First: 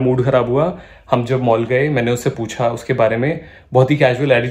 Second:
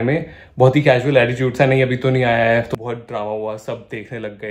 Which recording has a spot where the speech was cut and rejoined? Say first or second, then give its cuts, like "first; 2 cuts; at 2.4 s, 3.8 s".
second; 1 cut; at 2.7 s